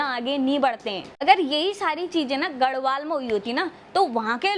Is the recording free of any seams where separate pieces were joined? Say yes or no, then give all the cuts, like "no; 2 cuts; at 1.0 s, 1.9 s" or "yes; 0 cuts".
no; 1 cut; at 1.2 s